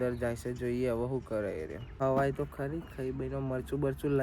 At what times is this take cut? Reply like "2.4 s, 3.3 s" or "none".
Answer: 1.8 s

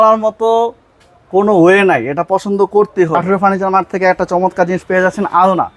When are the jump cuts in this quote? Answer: 3.2 s

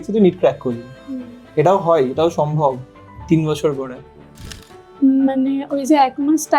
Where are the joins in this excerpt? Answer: 4.6 s

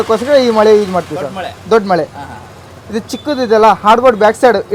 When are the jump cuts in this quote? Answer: none

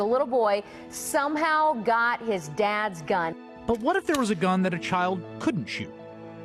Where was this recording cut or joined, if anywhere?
none

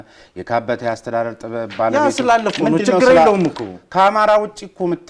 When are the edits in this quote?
none

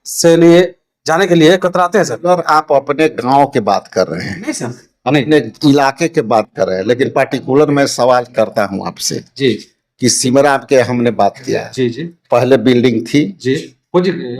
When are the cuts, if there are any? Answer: none

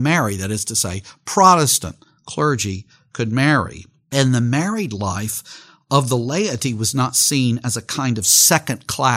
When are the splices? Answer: none

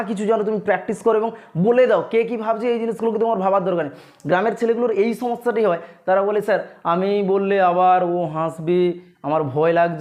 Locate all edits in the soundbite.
none

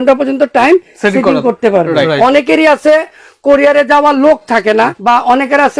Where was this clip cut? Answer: 2.1 s, 5.0 s

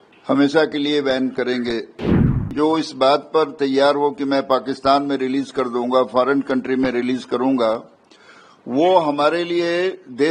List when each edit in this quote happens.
2.2 s

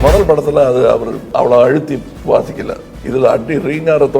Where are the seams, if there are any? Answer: 1.2 s, 2.1 s, 2.9 s

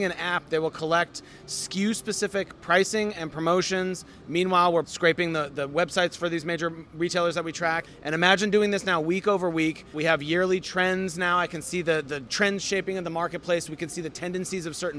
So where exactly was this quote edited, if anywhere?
4.8 s, 7.9 s, 10.0 s, 12.2 s

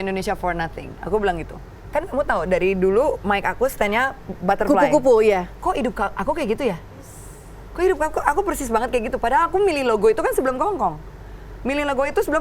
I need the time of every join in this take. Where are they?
1.8 s

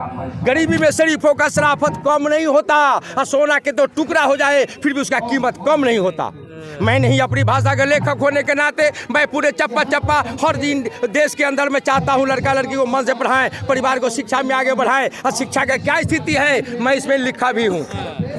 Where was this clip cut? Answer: none

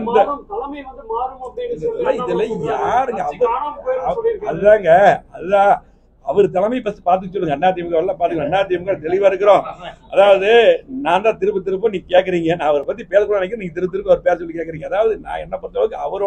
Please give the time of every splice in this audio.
none

